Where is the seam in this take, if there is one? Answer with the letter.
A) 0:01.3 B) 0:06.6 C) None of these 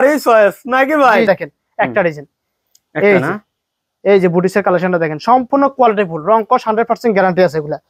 A